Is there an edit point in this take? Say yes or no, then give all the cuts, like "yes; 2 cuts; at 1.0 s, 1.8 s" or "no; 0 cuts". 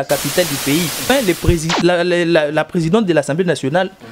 yes; 1 cut; at 1.0 s